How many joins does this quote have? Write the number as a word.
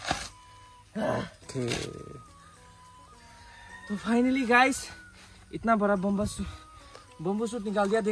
zero